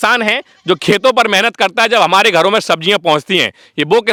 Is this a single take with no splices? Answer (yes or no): yes